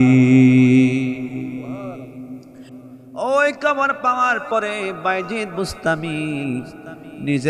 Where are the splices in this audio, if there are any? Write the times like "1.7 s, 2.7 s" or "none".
2.8 s